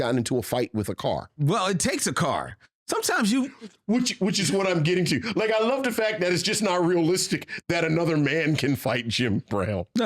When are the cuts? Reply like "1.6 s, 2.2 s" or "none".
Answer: 1.3 s